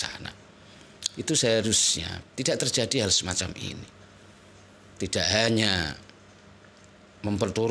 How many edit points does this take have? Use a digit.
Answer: 0